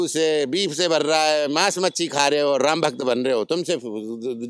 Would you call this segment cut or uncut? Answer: uncut